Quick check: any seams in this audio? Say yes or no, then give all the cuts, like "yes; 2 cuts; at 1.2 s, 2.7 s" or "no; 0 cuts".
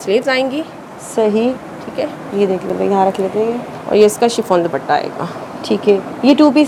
no; 0 cuts